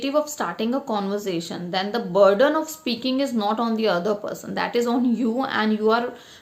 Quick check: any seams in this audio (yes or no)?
no